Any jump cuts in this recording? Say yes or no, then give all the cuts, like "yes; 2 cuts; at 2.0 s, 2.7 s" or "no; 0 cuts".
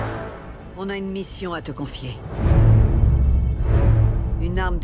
yes; 1 cut; at 2.2 s